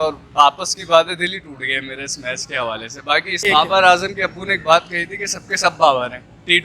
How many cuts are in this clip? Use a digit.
1